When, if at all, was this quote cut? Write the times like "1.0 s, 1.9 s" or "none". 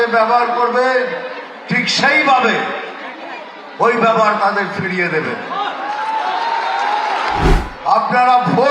7.5 s